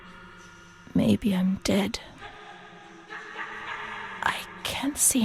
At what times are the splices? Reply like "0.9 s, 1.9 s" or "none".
none